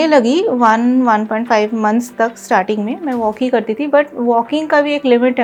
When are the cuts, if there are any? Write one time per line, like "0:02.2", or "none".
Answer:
none